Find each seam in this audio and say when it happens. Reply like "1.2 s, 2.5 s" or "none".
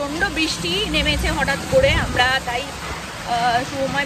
none